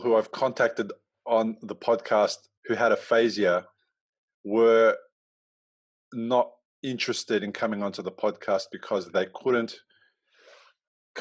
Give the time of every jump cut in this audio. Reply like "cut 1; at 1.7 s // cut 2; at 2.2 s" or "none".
cut 1; at 2.5 s